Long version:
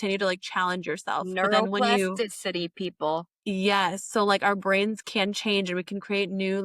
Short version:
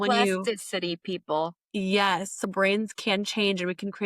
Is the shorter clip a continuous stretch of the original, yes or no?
no